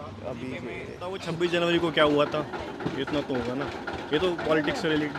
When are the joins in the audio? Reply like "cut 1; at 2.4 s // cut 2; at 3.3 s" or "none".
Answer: cut 1; at 1.3 s